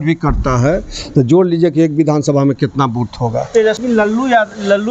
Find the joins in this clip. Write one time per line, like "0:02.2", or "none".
0:03.8